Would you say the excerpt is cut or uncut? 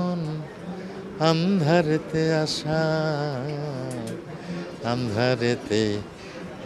uncut